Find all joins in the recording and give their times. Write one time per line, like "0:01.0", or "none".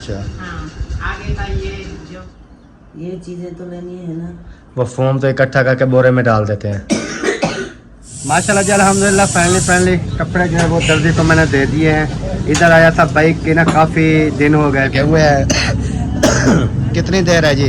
0:02.2
0:08.1
0:14.9